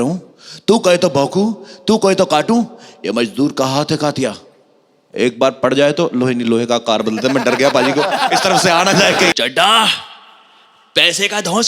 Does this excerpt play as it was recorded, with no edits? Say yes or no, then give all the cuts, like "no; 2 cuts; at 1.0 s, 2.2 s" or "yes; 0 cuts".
no; 1 cut; at 9.3 s